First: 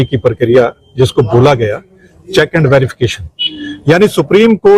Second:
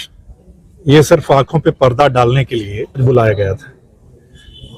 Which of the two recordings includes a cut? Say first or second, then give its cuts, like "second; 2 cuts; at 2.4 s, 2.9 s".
second; 1 cut; at 3.0 s